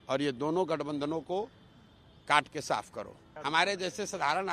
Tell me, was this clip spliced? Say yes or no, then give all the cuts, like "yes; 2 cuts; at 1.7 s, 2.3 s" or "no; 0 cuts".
yes; 1 cut; at 3.2 s